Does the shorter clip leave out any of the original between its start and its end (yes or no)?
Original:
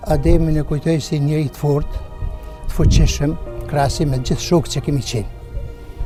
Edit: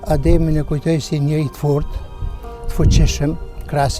no